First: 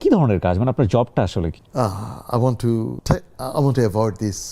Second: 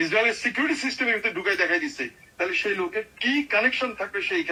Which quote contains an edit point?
first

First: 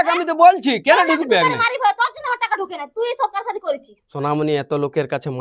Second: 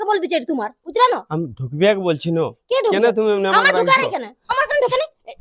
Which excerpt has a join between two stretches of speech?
first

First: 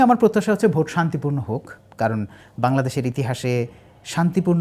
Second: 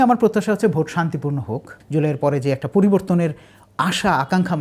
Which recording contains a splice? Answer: second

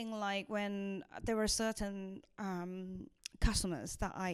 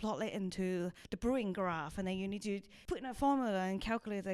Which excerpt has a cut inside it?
second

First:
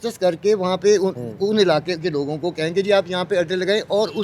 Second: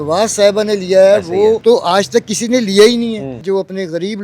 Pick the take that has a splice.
second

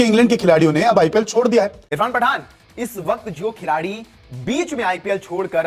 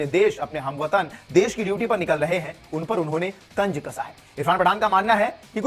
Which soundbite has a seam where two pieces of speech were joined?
first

